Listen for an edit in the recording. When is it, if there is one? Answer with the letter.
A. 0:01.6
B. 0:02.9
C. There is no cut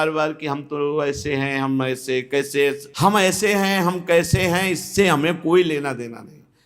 B